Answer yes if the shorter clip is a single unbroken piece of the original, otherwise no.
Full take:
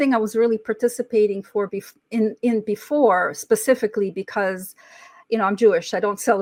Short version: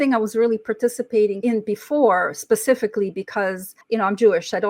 no